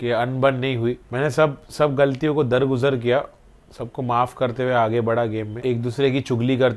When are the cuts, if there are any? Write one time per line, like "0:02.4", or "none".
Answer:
0:01.0
0:05.6